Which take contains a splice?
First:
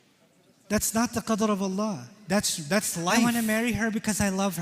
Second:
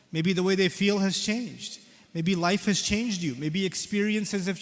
first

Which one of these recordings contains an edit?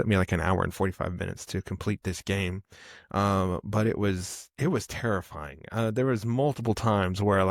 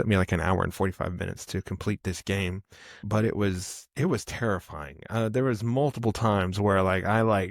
second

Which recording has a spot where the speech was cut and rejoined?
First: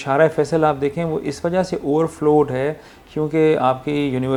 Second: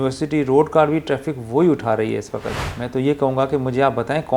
second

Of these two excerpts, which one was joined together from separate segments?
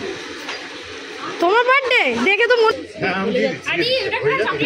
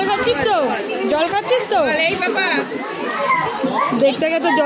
first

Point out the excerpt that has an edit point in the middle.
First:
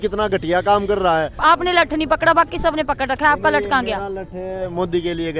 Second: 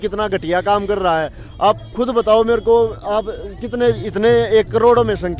first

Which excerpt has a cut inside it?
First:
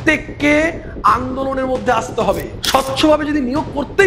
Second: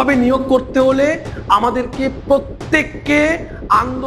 first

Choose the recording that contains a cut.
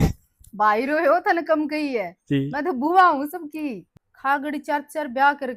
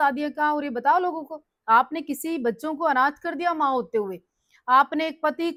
first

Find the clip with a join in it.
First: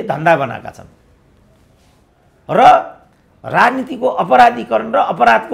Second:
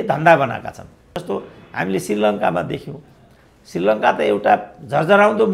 second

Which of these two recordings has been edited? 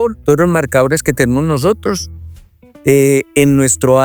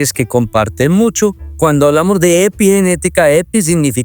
second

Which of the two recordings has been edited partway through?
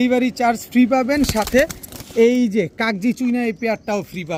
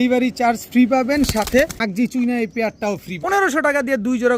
second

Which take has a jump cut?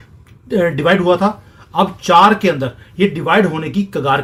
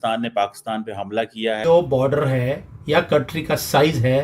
second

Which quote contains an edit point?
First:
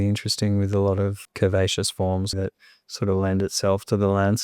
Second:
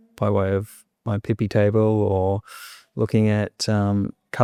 first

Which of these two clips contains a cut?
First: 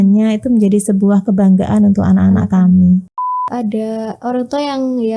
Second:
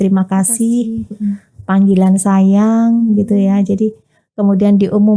first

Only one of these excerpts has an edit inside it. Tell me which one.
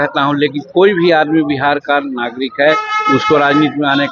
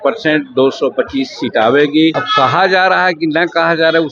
second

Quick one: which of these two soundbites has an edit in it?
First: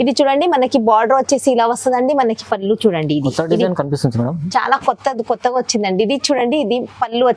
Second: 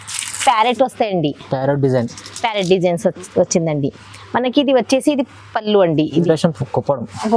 second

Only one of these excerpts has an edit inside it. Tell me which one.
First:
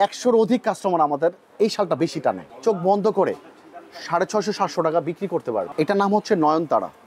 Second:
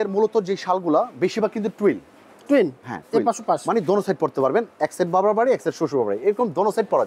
first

